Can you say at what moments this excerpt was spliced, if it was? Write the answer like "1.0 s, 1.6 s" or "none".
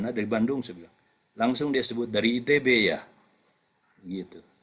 none